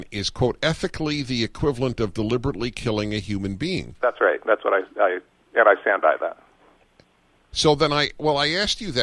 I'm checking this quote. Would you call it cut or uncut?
uncut